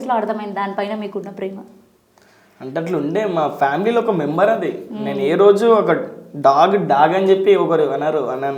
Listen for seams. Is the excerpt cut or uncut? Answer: uncut